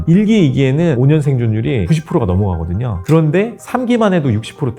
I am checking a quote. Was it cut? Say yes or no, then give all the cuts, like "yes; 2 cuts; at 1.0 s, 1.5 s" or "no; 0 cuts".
yes; 1 cut; at 1.0 s